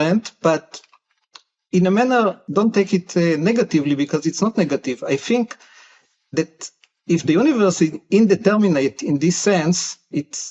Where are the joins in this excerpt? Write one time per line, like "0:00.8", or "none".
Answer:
0:02.4

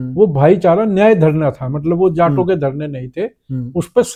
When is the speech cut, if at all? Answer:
none

